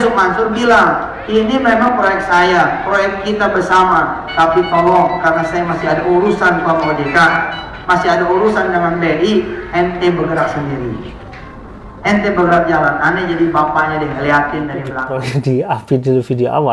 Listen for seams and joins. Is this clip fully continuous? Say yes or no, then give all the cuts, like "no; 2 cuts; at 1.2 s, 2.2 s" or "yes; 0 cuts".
no; 1 cut; at 15.4 s